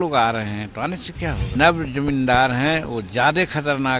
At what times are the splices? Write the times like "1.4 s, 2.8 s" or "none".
1.5 s